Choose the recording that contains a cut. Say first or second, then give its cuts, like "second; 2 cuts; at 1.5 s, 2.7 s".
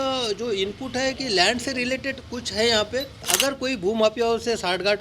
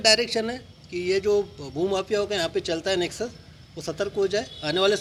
first; 1 cut; at 3.3 s